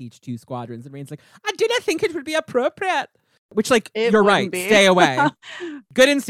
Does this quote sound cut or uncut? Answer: uncut